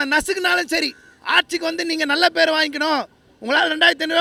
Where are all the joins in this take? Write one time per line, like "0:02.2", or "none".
none